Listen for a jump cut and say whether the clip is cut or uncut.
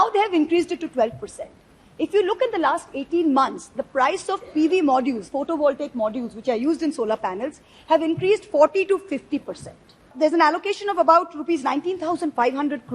cut